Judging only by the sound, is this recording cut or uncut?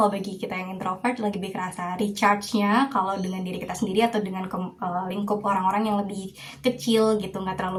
uncut